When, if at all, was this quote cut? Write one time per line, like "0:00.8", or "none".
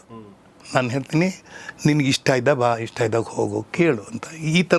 none

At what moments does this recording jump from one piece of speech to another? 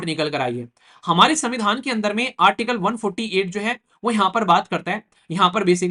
none

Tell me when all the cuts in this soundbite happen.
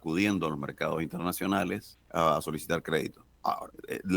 0:01.9
0:03.3

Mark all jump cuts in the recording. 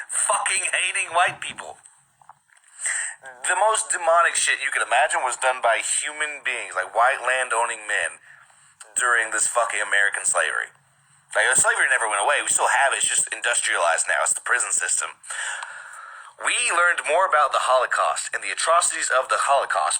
0:07.8
0:10.6
0:16.6

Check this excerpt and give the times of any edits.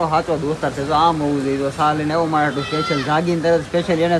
none

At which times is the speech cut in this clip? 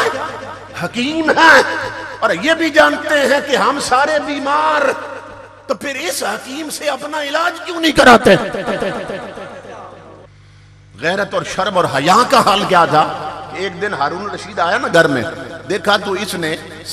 0:10.3

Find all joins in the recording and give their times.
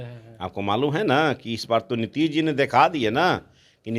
none

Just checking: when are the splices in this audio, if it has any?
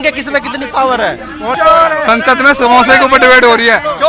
0:01.6

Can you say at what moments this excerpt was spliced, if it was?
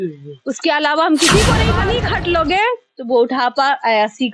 0:01.7

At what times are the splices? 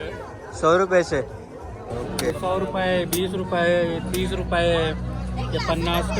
0:02.2

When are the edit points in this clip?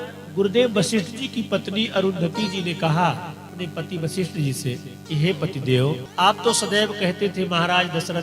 0:03.5
0:04.9
0:06.1

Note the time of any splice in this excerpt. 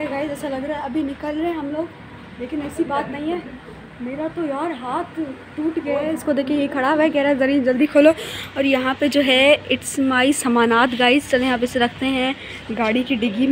none

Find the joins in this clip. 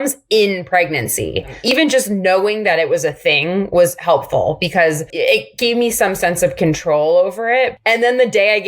0:01.6
0:05.1
0:07.7

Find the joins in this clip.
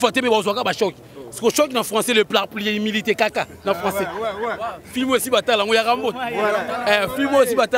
none

